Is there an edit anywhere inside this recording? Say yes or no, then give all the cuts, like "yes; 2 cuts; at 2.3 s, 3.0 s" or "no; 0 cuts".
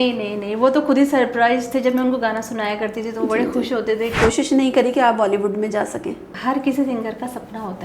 yes; 2 cuts; at 4.2 s, 6.3 s